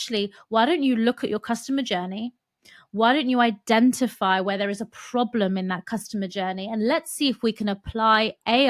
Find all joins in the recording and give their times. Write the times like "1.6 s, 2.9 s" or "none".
none